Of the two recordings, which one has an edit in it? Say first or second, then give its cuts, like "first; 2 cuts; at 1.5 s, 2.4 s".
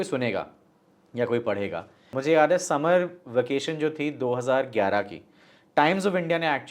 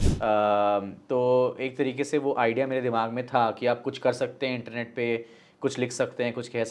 first; 1 cut; at 2.1 s